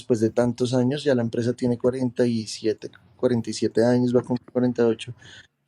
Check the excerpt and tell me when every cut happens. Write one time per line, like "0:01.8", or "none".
none